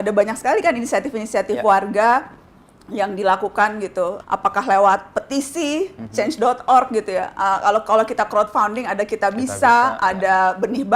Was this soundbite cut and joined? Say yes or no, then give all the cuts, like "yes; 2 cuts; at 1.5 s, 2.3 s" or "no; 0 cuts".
yes; 1 cut; at 4.2 s